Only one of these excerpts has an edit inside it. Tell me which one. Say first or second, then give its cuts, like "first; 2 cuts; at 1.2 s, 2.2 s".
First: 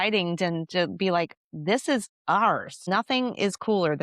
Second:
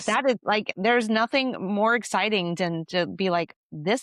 first; 1 cut; at 2.8 s